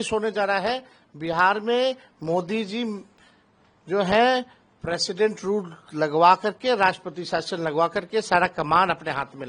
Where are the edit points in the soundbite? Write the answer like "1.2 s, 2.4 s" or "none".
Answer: none